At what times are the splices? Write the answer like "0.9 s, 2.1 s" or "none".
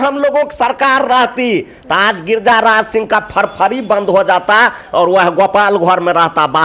none